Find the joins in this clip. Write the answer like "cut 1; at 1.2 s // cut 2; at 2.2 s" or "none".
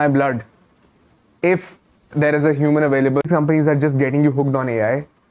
cut 1; at 3.2 s